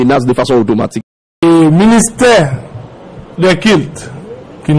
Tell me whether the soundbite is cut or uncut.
cut